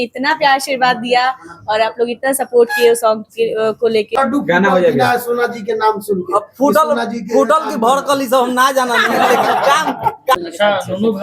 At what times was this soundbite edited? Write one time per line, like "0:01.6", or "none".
0:04.1
0:10.4

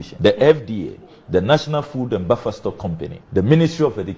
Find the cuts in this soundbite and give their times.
0:03.1

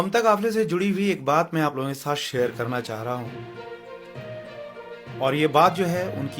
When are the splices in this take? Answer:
0:03.6
0:05.2

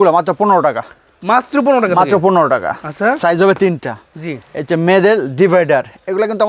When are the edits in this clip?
none

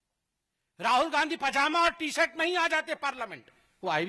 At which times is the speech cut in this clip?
none

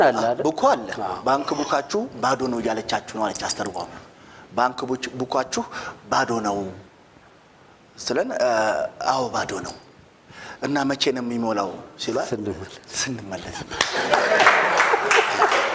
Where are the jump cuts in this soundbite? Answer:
none

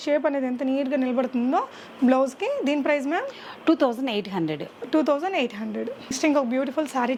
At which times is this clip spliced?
none

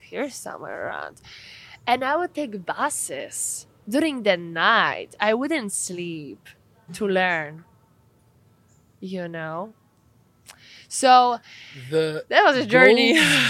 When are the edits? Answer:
none

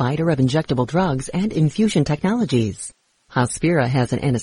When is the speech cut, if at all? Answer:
none

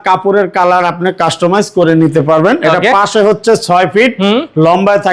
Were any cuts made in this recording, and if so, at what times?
none

